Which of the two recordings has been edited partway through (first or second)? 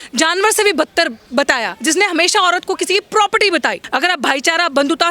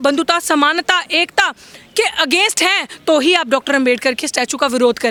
first